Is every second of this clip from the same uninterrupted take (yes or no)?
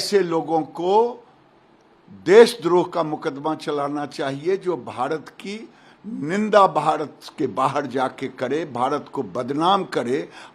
yes